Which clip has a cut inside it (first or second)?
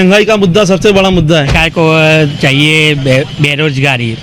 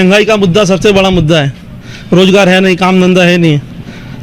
first